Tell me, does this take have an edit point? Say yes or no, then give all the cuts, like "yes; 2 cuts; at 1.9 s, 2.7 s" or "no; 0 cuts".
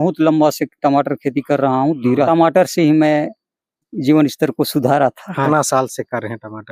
yes; 3 cuts; at 2.3 s, 3.9 s, 5.5 s